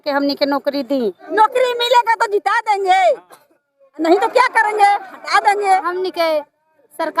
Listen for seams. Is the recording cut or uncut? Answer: cut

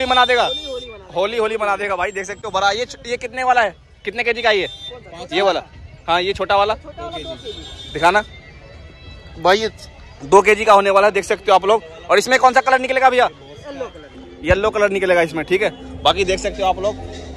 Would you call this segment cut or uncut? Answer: uncut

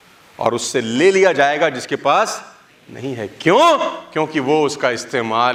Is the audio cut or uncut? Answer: uncut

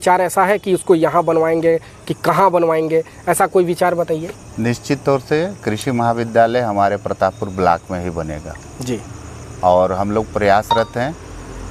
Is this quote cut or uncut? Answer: uncut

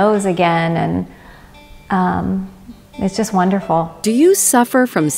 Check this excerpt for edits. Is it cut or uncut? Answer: cut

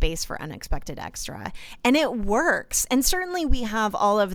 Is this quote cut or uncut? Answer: uncut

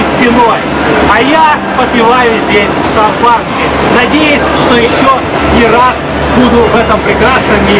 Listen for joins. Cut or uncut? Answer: uncut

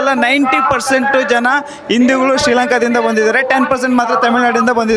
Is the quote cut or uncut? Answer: uncut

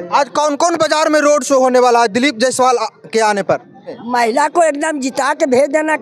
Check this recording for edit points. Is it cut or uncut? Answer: cut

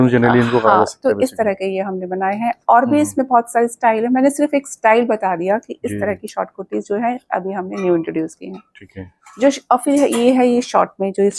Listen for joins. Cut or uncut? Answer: uncut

